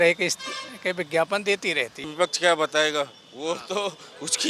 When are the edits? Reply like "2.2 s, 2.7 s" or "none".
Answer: 2.1 s